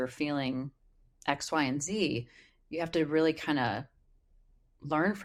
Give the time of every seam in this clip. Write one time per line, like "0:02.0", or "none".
none